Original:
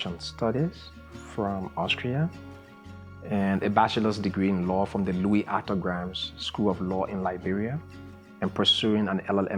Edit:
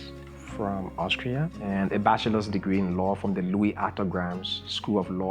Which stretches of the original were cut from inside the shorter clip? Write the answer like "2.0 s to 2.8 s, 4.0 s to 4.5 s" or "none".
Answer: 2.4 s to 3.3 s